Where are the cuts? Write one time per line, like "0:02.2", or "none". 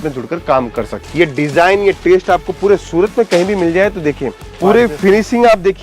0:01.0
0:04.6